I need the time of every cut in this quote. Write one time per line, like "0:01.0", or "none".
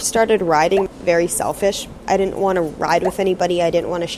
0:00.9

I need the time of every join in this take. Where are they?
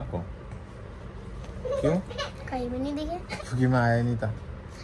0:03.3

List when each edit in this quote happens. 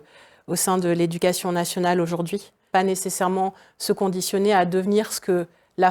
0:02.6

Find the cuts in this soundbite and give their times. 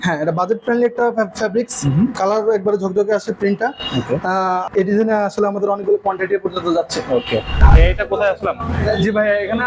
0:04.6
0:07.6

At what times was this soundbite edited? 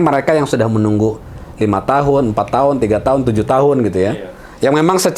none

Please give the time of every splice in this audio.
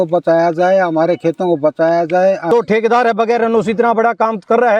0:02.5

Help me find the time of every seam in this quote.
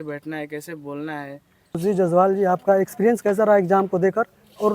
0:01.7

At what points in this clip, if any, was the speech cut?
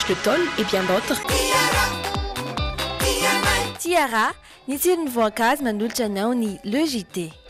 0:01.2

